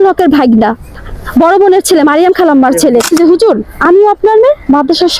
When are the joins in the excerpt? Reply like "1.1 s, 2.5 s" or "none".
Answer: 0.9 s, 3.1 s